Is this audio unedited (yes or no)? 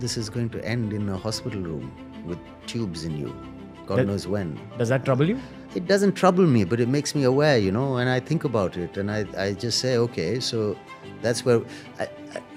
yes